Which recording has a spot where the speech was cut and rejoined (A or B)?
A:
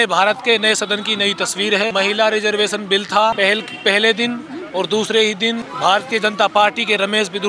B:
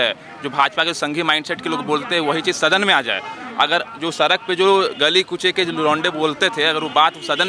A